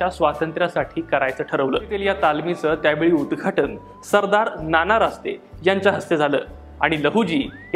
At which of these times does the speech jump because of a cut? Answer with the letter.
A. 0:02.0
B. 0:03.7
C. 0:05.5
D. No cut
A